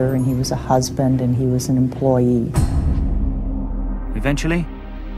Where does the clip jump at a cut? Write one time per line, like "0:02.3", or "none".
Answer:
0:02.5